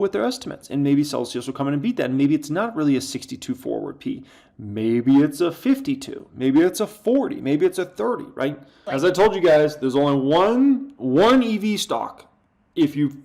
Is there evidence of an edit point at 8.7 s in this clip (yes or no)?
yes